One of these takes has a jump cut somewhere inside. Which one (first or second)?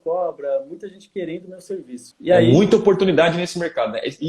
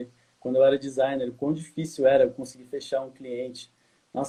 first